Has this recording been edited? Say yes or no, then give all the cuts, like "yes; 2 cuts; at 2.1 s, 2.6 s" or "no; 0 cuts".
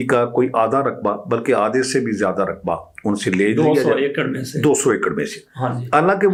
no; 0 cuts